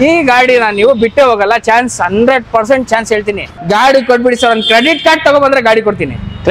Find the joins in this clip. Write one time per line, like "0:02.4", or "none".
0:03.5